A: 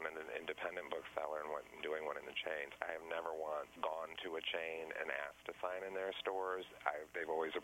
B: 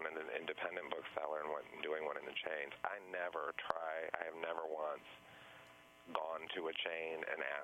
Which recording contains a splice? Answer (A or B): A